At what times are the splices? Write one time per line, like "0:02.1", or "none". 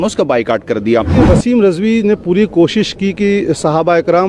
0:01.2